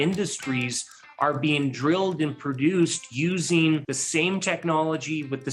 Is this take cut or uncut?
cut